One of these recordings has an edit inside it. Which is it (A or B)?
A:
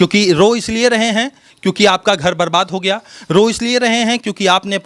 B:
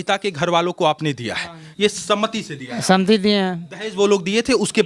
B